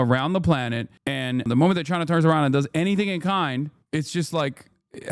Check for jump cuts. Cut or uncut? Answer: cut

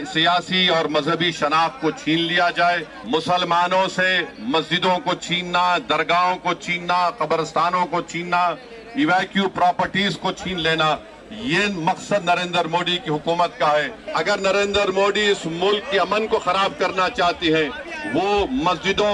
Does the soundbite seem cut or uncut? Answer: cut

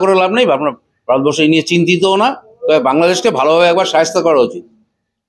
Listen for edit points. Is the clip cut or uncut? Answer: uncut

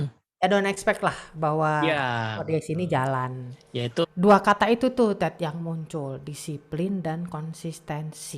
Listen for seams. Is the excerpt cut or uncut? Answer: cut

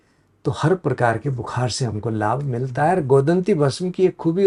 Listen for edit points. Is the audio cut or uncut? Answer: uncut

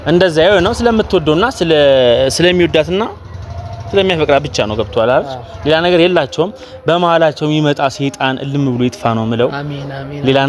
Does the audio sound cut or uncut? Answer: uncut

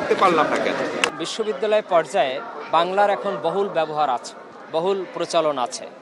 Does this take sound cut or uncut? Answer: cut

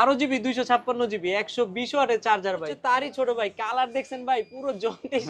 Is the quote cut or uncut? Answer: cut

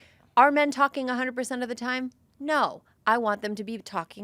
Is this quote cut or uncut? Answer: uncut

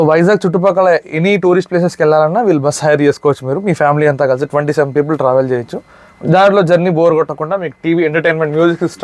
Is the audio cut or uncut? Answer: uncut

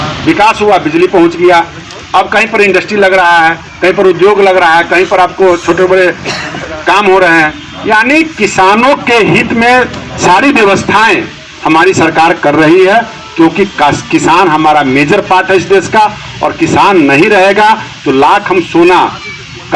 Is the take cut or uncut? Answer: uncut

